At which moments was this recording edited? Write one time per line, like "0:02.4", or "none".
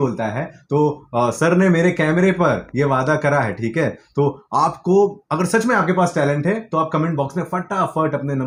none